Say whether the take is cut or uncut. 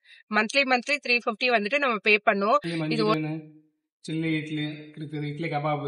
cut